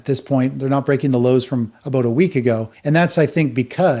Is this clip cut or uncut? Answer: uncut